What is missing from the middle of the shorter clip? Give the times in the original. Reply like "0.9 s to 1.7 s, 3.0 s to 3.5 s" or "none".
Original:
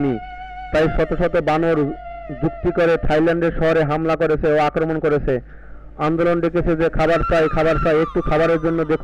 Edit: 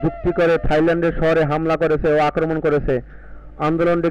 none